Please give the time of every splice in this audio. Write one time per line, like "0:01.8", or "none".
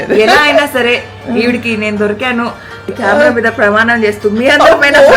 0:02.8